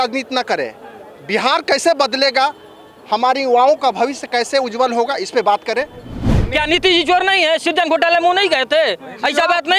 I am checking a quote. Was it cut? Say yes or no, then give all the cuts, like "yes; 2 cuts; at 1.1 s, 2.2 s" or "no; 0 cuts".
yes; 1 cut; at 6.4 s